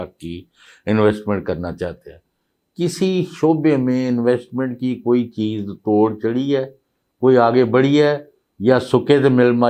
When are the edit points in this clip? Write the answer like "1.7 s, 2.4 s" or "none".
none